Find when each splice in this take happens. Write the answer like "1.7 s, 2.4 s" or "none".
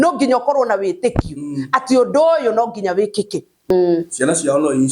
3.7 s